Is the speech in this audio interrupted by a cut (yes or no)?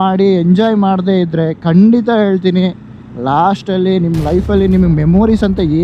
no